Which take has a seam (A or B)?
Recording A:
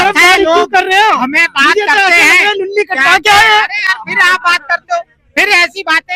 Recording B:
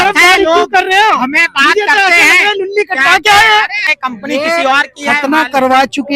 B